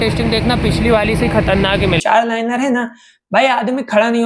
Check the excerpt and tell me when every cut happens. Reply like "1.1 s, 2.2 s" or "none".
2.0 s

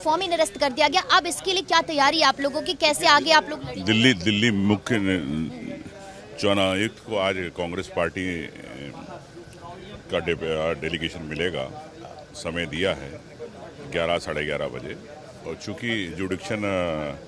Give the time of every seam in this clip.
none

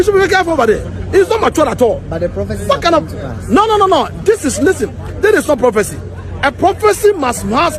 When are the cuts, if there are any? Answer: none

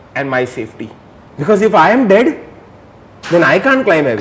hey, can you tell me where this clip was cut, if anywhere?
1.2 s

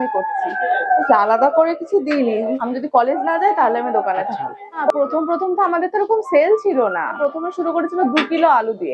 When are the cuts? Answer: 2.5 s, 4.9 s, 7.2 s

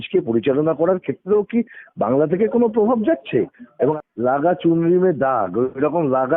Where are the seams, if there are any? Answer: 3.6 s

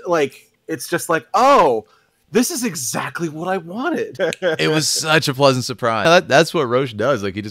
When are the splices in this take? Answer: 4.1 s, 6.0 s

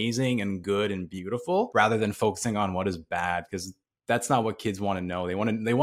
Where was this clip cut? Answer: 1.7 s

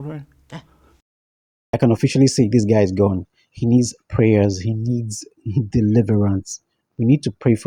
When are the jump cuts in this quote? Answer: none

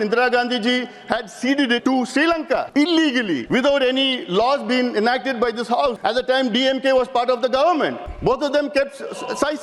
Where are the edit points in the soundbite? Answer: 1.8 s, 2.7 s, 3.4 s, 6.0 s, 8.1 s

